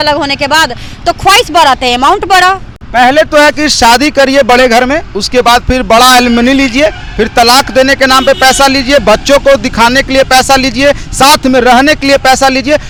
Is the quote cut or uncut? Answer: uncut